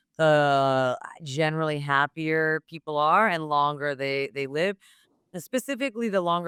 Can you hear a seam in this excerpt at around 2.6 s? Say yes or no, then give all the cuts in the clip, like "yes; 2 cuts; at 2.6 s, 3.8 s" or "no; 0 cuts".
no; 0 cuts